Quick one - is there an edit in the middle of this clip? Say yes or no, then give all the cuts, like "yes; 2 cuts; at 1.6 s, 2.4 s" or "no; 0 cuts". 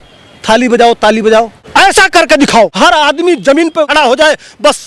yes; 3 cuts; at 1.6 s, 2.7 s, 3.9 s